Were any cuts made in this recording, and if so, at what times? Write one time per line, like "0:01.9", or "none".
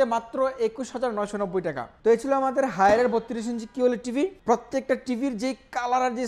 0:01.9
0:04.4